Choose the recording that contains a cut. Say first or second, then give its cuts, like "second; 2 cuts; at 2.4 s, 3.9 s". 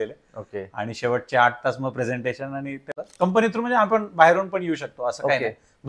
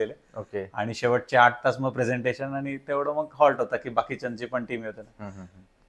first; 1 cut; at 3.0 s